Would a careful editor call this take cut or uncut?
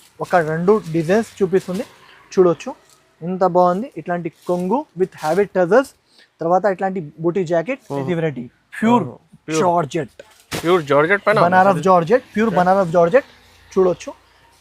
cut